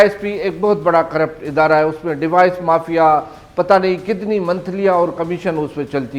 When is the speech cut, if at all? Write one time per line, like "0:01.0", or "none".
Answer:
none